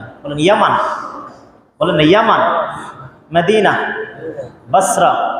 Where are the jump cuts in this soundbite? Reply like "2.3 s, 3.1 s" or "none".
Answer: none